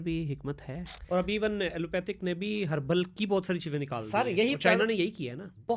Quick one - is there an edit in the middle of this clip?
yes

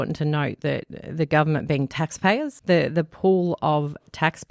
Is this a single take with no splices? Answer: no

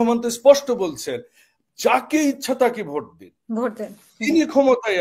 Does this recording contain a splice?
no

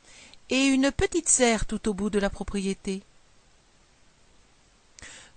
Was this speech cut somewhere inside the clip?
no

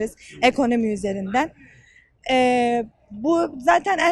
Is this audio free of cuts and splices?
yes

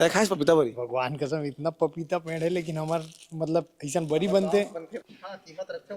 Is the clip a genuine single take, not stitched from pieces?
no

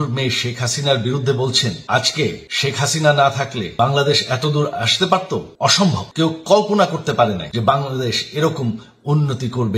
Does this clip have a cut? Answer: yes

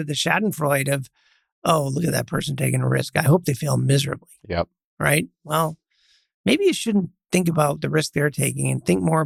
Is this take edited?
no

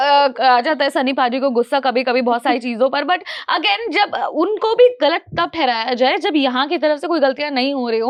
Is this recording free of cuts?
yes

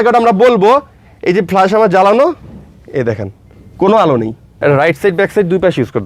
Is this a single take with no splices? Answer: no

